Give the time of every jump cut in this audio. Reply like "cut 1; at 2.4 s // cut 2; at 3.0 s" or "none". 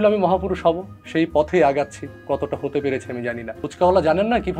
cut 1; at 1.0 s // cut 2; at 2.1 s // cut 3; at 3.5 s